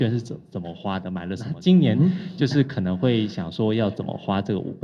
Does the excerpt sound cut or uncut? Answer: cut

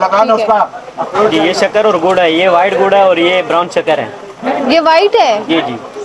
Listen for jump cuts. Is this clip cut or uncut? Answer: cut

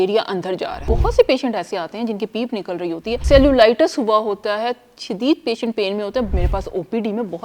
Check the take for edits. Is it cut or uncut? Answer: cut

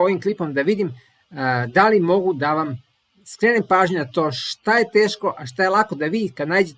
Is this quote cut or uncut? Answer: uncut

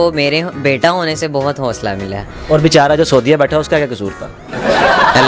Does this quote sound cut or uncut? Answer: uncut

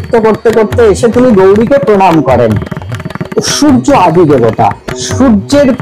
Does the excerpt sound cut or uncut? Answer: cut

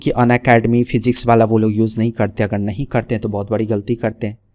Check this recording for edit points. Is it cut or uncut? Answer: uncut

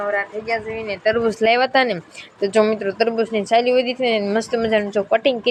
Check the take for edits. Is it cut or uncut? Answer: uncut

